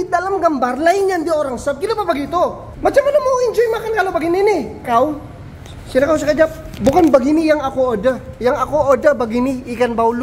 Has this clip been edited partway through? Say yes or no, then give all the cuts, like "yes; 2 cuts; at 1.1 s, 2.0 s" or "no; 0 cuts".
yes; 3 cuts; at 2.7 s, 4.8 s, 6.7 s